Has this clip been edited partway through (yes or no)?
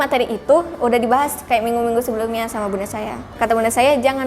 yes